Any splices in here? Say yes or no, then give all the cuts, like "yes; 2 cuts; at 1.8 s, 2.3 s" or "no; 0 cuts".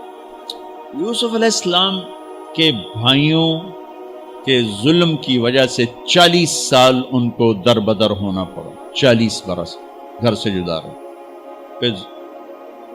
yes; 1 cut; at 0.9 s